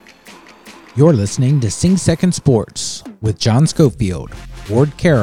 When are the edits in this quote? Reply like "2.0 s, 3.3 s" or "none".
0.9 s